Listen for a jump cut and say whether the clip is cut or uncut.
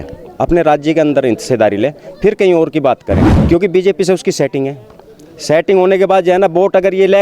cut